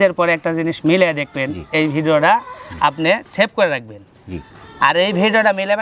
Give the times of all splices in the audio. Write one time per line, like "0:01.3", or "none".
none